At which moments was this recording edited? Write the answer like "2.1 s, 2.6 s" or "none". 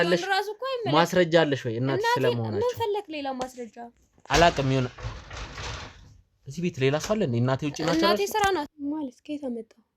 8.7 s